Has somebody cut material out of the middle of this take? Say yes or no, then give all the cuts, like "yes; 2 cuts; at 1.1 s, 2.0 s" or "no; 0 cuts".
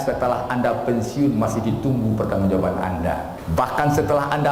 yes; 1 cut; at 3.4 s